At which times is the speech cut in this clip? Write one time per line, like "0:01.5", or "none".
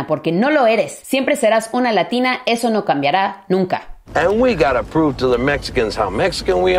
0:01.0
0:04.0